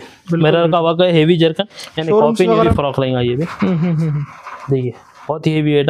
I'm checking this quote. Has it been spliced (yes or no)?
yes